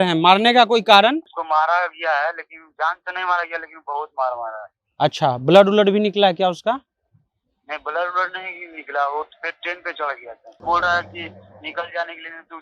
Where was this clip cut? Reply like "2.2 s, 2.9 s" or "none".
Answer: 1.3 s, 10.5 s